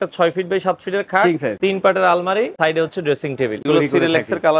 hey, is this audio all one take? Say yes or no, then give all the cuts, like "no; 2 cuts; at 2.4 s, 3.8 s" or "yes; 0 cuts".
no; 3 cuts; at 1.6 s, 2.5 s, 3.6 s